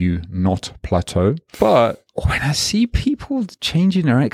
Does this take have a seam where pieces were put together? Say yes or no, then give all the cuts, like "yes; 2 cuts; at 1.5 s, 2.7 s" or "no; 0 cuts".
yes; 3 cuts; at 1.5 s, 2.1 s, 3.5 s